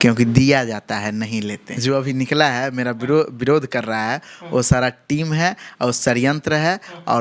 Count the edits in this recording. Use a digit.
1